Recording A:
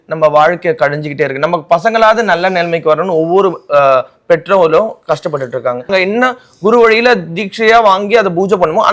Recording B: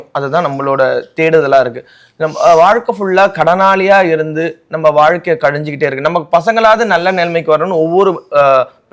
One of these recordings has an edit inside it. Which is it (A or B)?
A